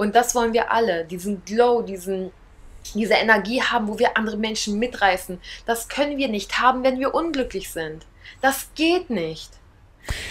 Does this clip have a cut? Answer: no; 0 cuts

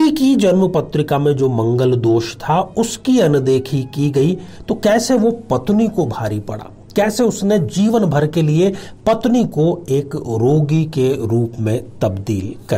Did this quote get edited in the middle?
no; 0 cuts

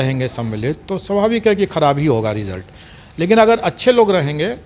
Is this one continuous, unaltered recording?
yes; 0 cuts

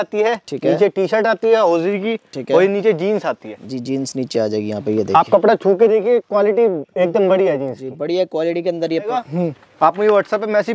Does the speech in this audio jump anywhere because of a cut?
yes; 1 cut; at 9.1 s

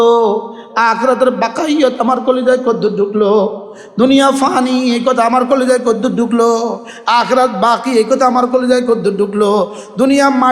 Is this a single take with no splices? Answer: yes; 0 cuts

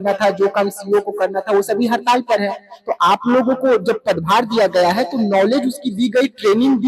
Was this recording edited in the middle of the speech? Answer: no; 0 cuts

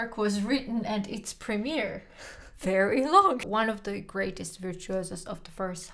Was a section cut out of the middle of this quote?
yes; 1 cut; at 3.4 s

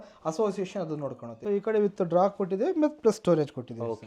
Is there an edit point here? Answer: yes; 1 cut; at 1.3 s

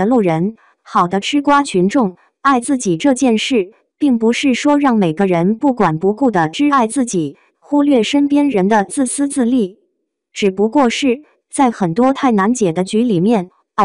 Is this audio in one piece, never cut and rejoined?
no; 1 cut; at 2.6 s

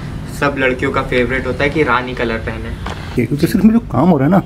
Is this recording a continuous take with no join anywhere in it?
no; 1 cut; at 3.0 s

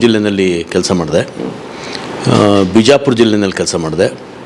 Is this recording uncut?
yes; 0 cuts

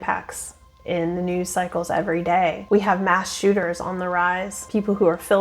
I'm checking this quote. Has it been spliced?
yes; 2 cuts; at 2.6 s, 4.5 s

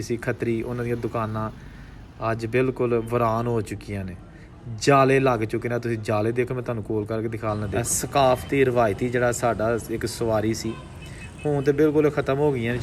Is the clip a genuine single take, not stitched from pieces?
no; 1 cut; at 7.8 s

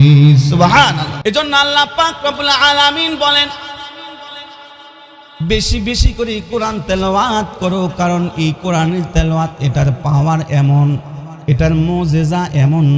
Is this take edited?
yes; 1 cut; at 1.1 s

